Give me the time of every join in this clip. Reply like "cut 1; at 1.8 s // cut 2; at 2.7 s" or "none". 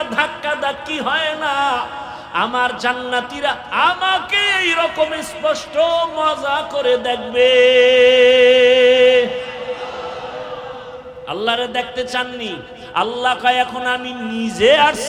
cut 1; at 12.7 s